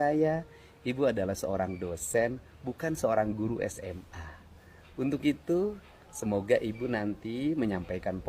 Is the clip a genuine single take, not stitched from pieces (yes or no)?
yes